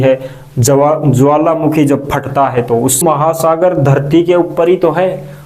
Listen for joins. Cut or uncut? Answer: cut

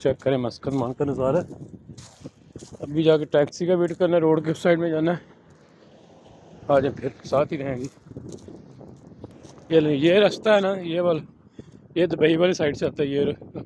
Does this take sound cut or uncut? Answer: uncut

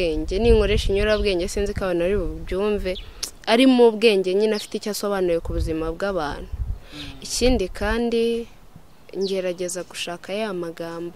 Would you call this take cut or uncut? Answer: uncut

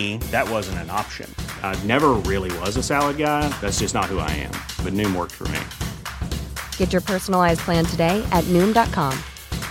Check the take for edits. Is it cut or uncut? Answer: uncut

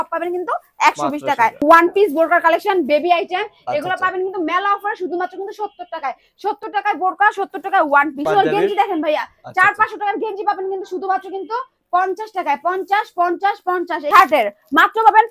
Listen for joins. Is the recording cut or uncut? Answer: cut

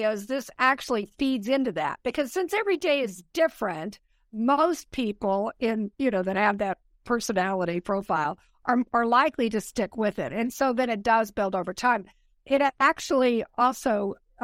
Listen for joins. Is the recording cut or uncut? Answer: uncut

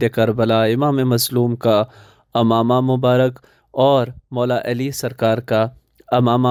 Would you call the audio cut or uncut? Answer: uncut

